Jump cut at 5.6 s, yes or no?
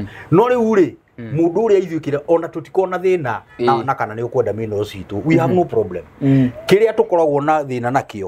no